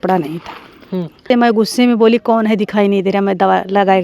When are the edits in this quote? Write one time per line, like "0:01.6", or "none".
0:01.4